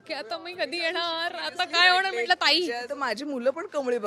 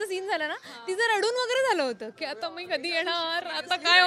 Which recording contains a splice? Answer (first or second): first